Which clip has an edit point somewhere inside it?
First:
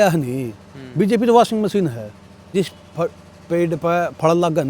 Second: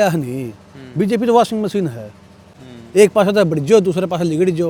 first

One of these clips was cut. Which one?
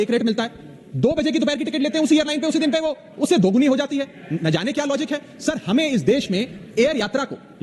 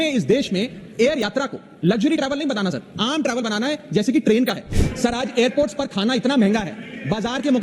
second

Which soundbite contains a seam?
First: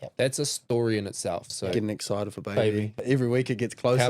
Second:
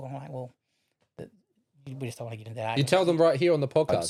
first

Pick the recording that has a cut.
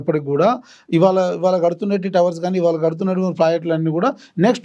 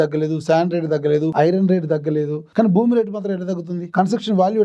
second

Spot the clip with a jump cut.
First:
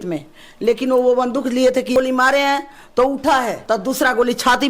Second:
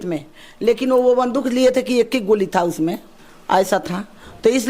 first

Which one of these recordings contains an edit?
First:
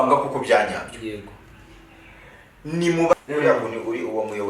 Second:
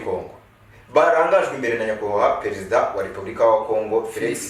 first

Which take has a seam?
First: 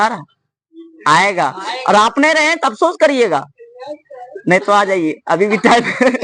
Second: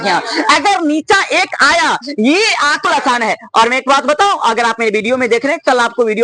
second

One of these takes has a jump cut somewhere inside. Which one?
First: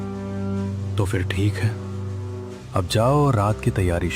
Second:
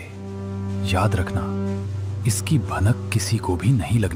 first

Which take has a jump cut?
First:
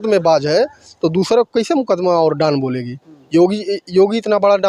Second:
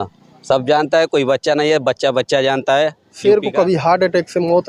second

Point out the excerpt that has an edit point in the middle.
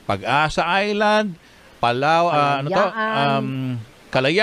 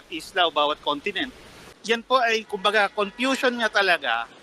second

